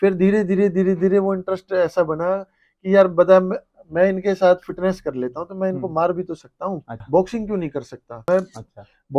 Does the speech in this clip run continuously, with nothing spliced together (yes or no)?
no